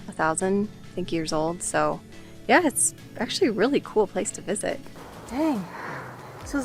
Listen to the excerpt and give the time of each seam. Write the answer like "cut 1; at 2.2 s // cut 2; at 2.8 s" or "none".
cut 1; at 4.9 s